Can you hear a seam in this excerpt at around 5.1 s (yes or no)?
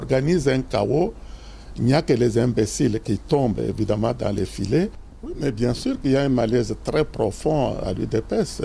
yes